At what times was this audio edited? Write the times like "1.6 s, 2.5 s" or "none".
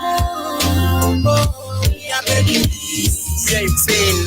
2.6 s